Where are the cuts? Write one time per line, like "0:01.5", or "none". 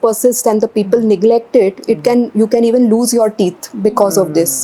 none